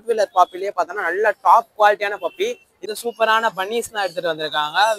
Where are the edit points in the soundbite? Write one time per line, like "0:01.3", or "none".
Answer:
0:02.9